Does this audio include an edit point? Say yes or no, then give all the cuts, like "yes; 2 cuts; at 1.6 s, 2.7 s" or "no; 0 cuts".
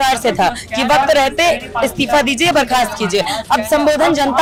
no; 0 cuts